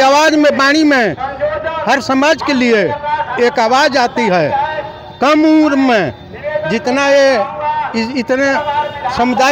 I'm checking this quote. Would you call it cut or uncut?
uncut